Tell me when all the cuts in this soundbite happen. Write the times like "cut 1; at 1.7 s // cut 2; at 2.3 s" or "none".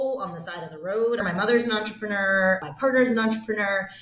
cut 1; at 1.2 s